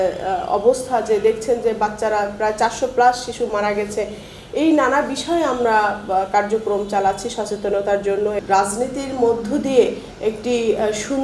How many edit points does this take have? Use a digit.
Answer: 1